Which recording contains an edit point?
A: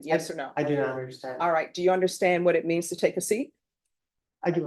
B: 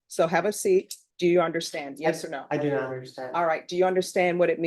B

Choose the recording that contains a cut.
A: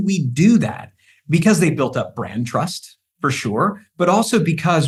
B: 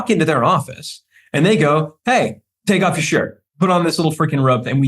B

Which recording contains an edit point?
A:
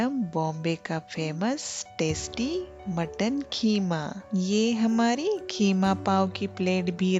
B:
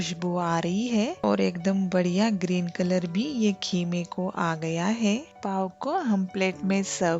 B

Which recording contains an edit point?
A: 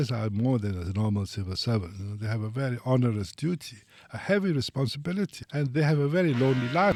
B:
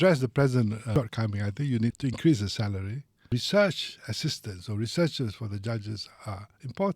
B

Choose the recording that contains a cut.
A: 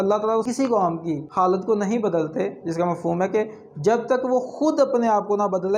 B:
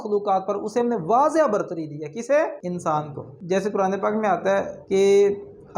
B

